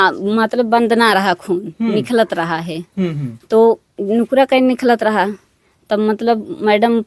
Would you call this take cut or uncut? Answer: uncut